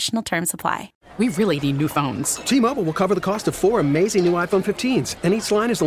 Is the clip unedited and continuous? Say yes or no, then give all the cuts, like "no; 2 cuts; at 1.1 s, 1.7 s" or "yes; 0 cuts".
no; 1 cut; at 1.0 s